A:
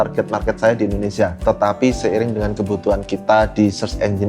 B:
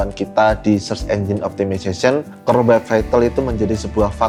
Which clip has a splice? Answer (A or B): A